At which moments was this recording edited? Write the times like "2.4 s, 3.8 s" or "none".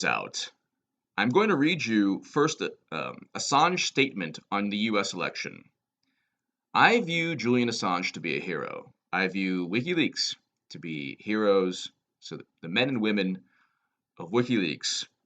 3.7 s